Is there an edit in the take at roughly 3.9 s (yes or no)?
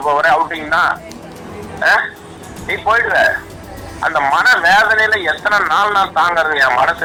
no